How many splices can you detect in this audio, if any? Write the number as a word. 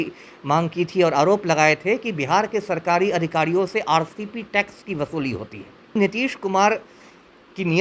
one